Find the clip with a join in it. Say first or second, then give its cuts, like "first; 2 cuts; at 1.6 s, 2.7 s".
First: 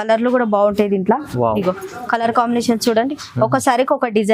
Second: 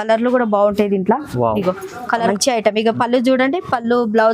second; 1 cut; at 2.3 s